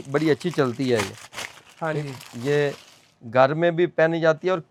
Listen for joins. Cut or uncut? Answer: uncut